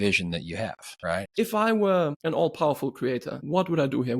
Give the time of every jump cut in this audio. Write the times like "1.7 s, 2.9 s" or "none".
1.2 s, 2.2 s, 3.4 s